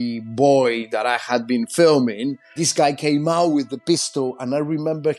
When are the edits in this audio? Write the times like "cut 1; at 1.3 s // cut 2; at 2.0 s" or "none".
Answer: cut 1; at 2.6 s